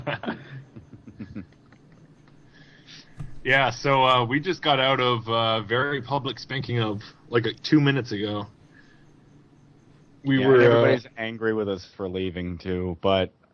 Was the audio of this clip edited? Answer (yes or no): yes